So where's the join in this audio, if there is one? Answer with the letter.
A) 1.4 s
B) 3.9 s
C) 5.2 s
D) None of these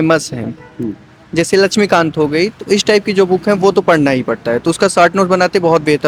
D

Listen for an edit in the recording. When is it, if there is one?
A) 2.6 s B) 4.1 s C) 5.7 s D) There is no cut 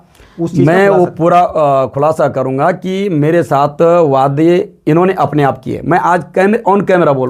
D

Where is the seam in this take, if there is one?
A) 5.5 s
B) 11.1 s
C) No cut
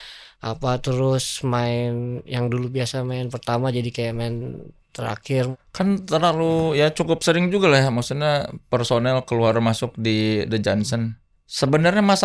A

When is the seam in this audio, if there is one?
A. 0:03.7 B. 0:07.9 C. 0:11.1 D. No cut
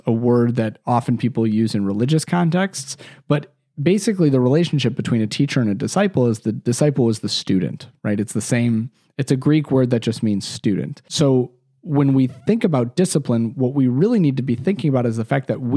C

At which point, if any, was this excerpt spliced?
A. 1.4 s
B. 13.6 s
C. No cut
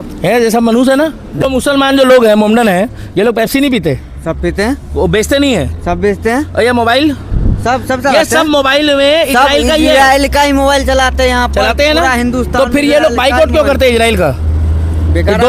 A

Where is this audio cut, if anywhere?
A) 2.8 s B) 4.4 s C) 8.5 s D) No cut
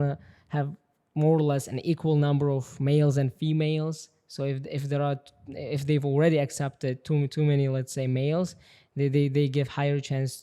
D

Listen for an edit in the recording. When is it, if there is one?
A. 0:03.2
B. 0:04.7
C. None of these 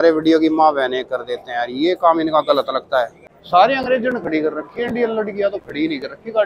A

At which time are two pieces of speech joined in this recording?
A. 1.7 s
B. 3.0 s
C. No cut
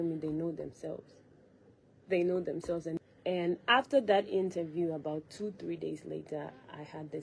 B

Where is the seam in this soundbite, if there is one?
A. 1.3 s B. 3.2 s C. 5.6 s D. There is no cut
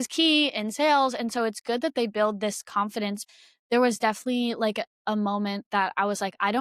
B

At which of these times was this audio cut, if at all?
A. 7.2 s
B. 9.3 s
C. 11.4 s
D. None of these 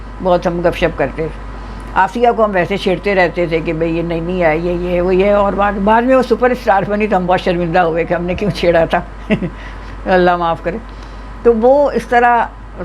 D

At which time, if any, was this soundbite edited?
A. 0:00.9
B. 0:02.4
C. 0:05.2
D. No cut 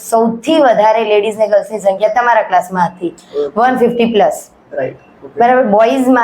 D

